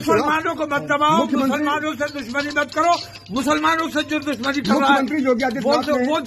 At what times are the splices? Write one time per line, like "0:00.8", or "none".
none